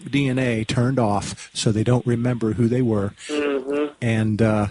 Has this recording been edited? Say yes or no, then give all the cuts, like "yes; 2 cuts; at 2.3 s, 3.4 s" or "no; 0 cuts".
no; 0 cuts